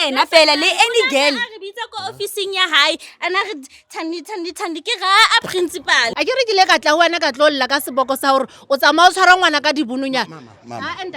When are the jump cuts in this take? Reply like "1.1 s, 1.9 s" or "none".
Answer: 6.1 s